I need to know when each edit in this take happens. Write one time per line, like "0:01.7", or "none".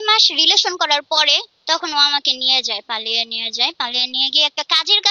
0:01.5